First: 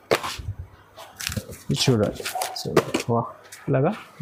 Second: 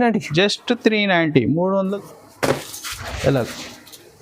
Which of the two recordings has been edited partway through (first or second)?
second